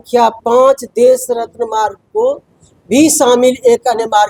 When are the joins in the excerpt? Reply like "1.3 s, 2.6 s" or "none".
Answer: none